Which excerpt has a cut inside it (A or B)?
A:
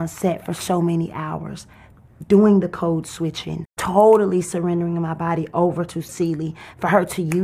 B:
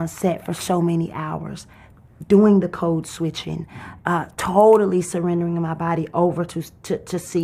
A